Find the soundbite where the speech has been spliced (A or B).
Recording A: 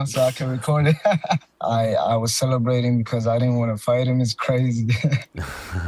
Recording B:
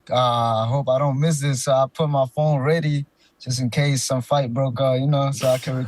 A